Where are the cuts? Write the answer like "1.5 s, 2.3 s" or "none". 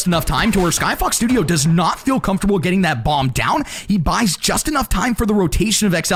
none